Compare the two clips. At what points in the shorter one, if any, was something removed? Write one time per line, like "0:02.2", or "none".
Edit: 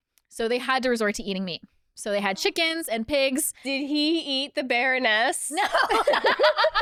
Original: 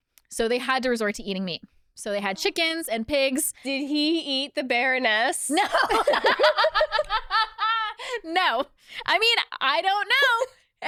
none